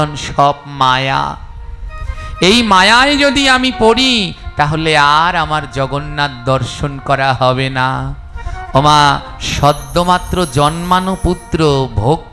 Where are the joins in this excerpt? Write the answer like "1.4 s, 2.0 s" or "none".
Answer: none